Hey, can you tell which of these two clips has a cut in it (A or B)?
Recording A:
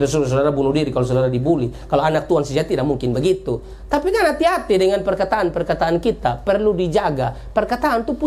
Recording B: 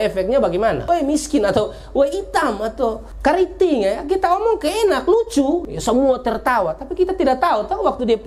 B